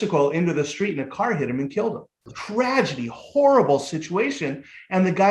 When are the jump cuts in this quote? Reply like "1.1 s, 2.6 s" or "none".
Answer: 2.3 s